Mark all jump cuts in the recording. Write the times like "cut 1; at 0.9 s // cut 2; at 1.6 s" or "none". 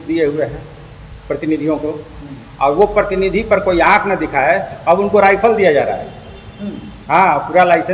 none